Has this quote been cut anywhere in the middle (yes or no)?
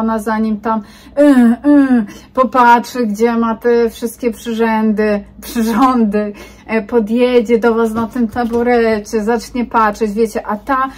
no